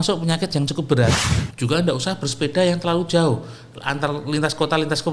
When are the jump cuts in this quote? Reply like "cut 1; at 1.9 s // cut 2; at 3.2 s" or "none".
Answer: cut 1; at 1.2 s